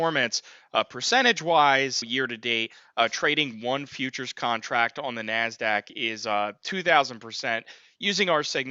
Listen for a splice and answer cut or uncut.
uncut